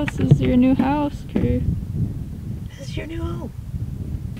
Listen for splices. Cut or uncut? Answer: uncut